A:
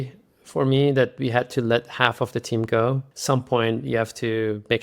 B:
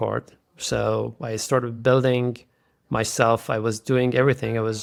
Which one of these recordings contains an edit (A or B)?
A